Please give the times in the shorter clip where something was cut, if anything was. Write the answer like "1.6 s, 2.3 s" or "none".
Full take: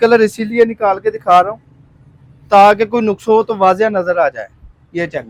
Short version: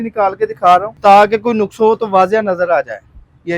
0.9 s